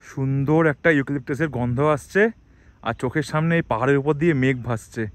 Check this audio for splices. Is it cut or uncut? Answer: uncut